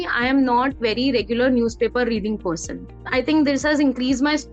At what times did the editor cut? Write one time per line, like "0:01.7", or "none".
0:03.0